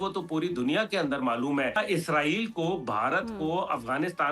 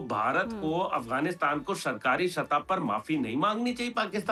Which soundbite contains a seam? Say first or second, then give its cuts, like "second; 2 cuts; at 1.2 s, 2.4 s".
first; 1 cut; at 1.8 s